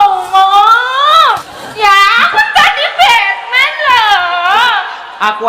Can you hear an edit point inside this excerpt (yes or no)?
yes